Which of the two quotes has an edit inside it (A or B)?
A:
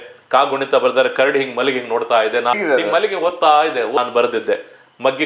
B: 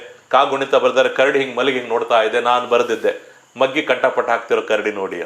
A